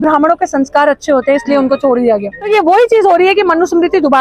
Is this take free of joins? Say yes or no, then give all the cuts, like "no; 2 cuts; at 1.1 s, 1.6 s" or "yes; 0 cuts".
no; 1 cut; at 2.4 s